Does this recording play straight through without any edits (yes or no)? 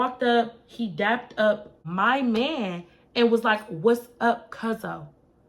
no